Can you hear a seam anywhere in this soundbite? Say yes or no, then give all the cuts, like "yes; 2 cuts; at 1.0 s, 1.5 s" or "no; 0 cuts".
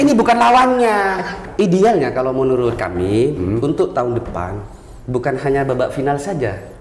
yes; 1 cut; at 1.4 s